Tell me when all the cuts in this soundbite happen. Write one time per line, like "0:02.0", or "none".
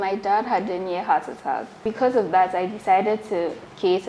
0:01.8

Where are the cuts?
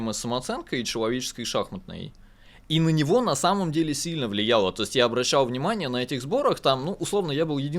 none

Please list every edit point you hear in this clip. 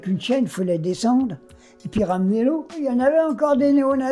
0:02.8

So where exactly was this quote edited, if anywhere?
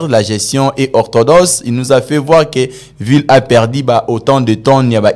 none

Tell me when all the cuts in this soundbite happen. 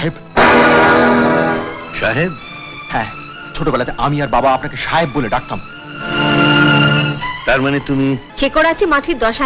0:08.3

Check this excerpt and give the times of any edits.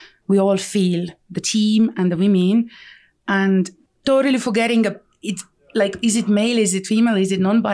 0:03.8

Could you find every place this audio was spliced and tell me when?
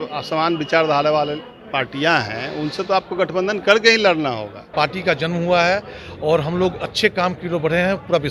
0:04.7

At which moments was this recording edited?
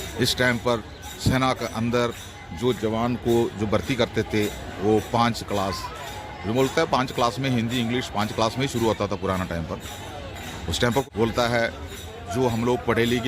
0:11.0

